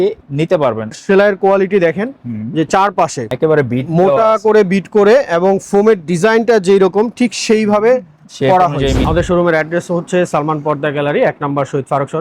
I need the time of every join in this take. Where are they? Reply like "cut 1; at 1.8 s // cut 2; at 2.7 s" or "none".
cut 1; at 0.9 s // cut 2; at 9.0 s